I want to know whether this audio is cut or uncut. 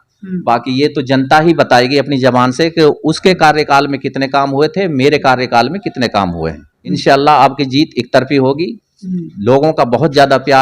cut